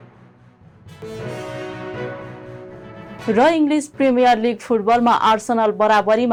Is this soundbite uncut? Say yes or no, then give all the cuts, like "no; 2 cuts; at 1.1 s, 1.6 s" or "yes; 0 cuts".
yes; 0 cuts